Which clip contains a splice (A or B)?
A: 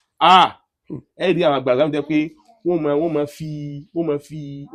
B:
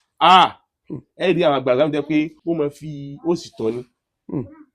B